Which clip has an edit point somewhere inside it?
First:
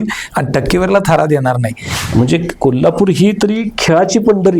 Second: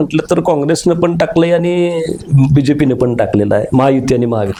first; 1 cut; at 1.9 s

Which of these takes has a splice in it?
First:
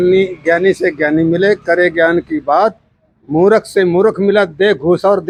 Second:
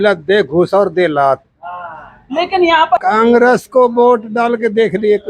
second; 1 cut; at 3.0 s

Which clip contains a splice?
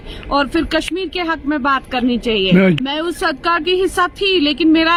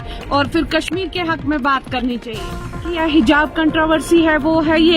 second; 1 cut; at 2.5 s

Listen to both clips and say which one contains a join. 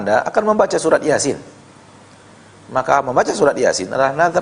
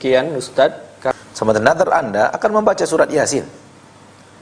second; 1 cut; at 1.2 s

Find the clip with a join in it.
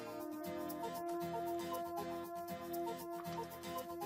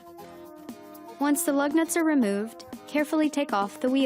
second; 1 cut; at 1.2 s

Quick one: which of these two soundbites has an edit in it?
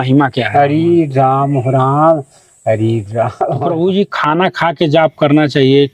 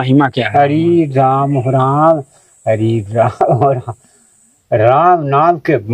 first; 1 cut; at 3.6 s

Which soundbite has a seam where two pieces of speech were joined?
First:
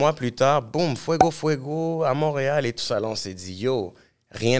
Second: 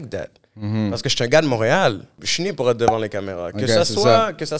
second; 1 cut; at 2.2 s

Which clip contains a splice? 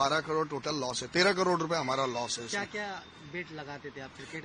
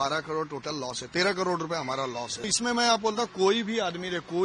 second; 1 cut; at 2.5 s

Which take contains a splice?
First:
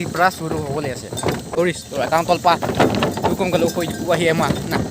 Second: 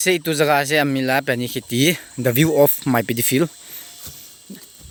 first; 1 cut; at 1.5 s

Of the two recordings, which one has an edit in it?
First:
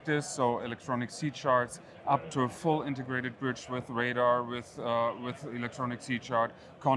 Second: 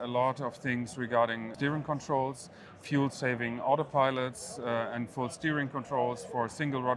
second; 1 cut; at 1.5 s

